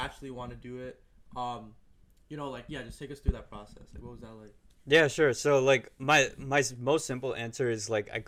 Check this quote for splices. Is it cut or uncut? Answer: uncut